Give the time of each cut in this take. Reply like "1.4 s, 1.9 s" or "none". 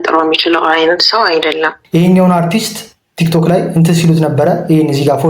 1.8 s